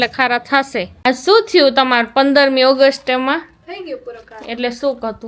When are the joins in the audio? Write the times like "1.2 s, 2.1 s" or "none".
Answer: 0.9 s